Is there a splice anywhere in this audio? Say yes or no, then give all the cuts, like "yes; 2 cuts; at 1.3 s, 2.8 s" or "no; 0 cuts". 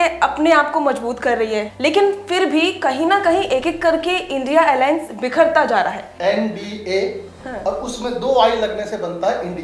yes; 2 cuts; at 1.7 s, 6.1 s